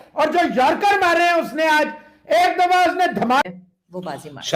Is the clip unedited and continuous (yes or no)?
no